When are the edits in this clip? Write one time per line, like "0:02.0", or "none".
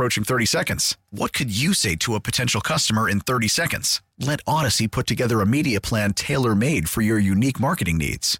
none